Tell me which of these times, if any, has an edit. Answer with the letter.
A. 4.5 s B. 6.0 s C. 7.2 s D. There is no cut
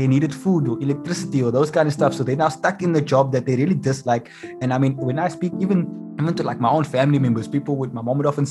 B